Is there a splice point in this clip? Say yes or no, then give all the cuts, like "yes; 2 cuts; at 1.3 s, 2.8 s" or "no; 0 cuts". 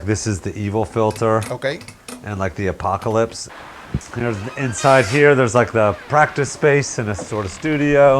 yes; 1 cut; at 3.4 s